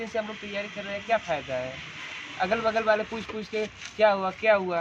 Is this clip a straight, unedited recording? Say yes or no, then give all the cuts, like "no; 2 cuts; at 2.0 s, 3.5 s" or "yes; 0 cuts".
yes; 0 cuts